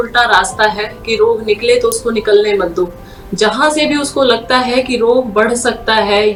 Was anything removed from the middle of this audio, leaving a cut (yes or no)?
no